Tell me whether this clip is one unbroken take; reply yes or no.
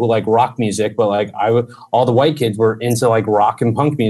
yes